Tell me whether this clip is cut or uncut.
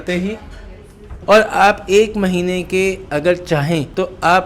cut